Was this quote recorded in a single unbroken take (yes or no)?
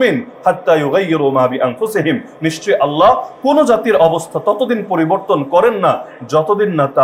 yes